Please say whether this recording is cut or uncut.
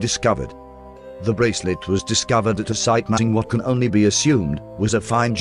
uncut